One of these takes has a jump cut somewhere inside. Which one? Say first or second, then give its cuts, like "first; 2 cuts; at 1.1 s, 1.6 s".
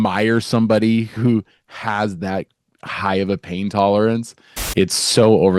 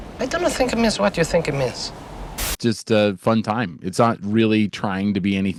first; 2 cuts; at 1.1 s, 4.5 s